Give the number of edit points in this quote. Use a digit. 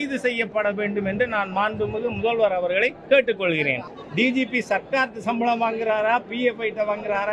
2